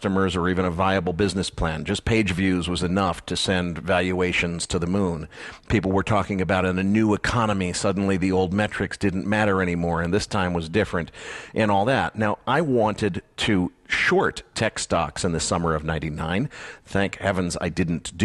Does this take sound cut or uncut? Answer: cut